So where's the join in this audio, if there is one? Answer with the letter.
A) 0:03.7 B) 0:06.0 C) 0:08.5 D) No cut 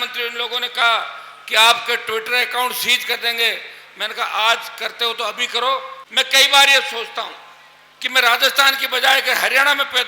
B